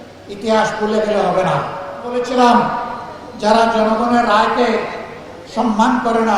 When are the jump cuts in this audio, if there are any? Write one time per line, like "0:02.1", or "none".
0:02.1